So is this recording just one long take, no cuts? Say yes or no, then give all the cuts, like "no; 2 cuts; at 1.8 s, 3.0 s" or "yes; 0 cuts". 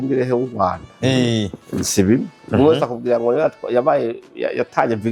yes; 0 cuts